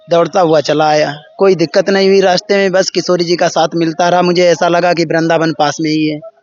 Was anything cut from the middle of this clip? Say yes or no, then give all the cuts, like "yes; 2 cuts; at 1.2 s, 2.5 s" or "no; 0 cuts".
no; 0 cuts